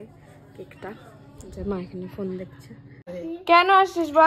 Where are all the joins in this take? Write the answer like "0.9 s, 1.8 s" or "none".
3.1 s